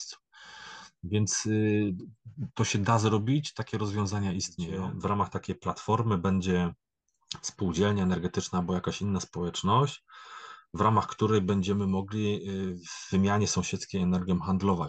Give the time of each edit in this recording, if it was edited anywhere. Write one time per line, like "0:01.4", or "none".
0:04.6